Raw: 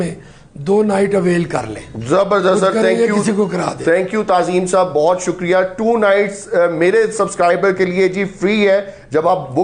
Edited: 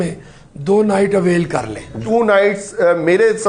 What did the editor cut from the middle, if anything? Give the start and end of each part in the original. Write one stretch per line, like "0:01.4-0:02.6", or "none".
0:02.0-0:05.7